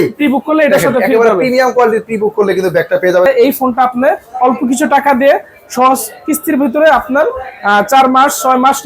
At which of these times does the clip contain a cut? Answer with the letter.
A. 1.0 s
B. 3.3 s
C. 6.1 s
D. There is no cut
B